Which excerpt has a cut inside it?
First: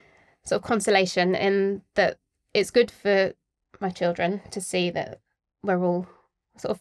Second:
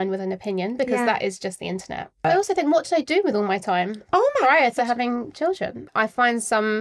second; 2 cuts; at 2.2 s, 5.8 s

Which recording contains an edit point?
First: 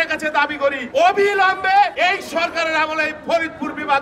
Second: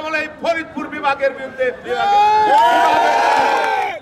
first; 2 cuts; at 0.8 s, 1.9 s

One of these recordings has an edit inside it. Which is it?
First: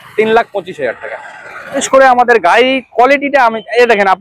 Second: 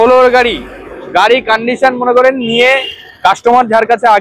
first; 1 cut; at 1.8 s

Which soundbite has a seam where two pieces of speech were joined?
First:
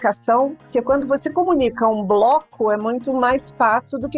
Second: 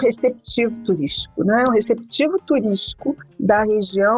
second; 1 cut; at 3.2 s

